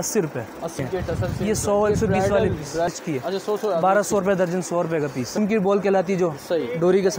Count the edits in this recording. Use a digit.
3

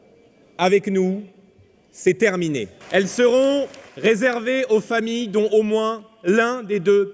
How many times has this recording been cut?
1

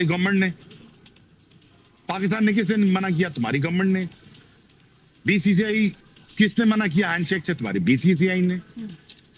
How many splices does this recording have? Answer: 0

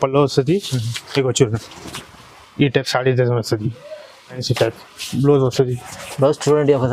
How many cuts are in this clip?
1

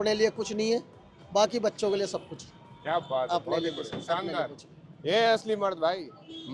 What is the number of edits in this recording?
0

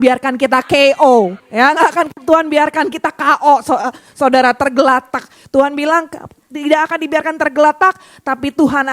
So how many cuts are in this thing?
1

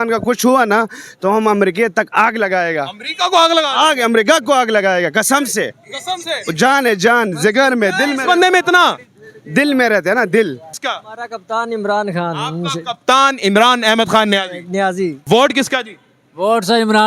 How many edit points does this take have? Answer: 2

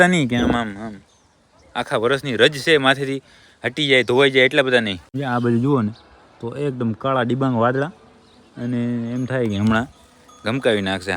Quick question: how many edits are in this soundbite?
1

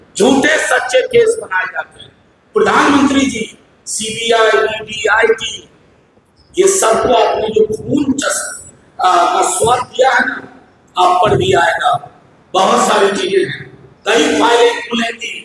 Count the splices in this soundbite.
0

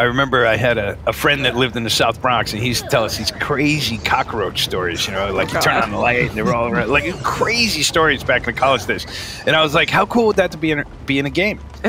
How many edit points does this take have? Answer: 1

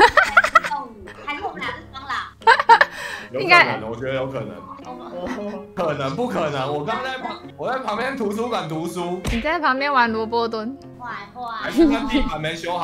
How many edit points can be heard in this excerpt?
0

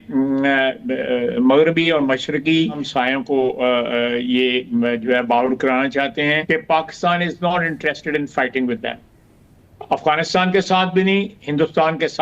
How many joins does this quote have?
2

